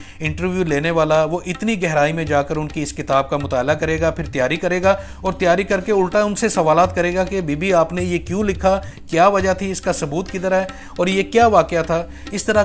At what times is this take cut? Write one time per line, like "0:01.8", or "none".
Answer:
none